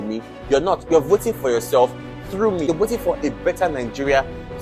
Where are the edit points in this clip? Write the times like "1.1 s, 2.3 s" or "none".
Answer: none